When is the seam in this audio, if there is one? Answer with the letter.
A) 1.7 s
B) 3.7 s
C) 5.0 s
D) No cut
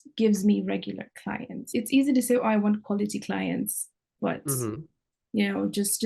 A